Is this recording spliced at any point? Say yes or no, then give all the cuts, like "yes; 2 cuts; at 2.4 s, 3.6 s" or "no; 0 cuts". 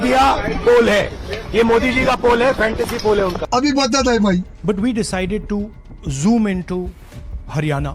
no; 0 cuts